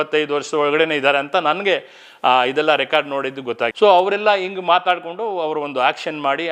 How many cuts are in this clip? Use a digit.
0